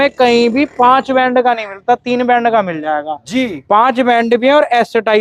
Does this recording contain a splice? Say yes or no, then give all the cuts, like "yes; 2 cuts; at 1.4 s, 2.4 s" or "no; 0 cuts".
no; 0 cuts